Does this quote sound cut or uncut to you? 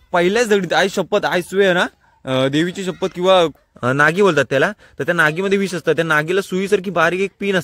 cut